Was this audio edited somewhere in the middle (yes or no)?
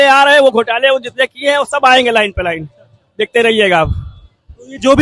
no